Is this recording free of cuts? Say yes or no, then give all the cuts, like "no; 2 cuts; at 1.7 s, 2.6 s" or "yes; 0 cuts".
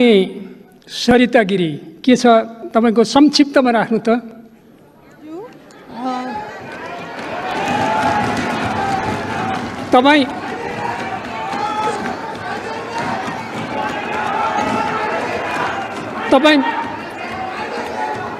yes; 0 cuts